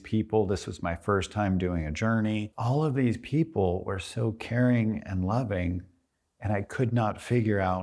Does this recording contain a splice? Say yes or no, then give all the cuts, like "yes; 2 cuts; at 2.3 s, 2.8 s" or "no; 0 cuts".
yes; 1 cut; at 2.5 s